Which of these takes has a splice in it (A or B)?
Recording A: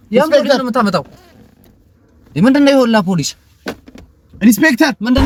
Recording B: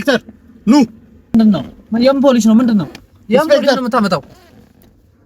B